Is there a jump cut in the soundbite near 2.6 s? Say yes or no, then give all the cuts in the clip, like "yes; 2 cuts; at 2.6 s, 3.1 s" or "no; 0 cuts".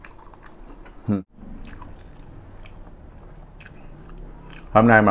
no; 1 cut; at 1.2 s